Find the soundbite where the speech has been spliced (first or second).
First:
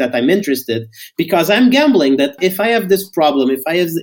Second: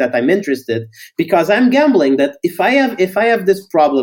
first